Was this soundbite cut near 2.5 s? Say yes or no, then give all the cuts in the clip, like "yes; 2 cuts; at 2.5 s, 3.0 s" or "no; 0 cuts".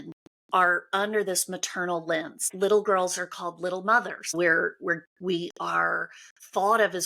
yes; 2 cuts; at 2.5 s, 4.3 s